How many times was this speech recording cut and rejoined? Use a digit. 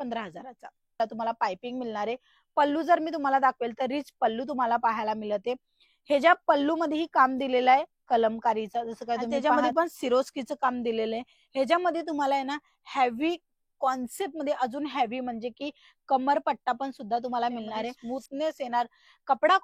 3